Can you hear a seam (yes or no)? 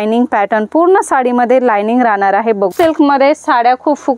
yes